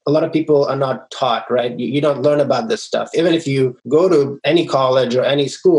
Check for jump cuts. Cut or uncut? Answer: cut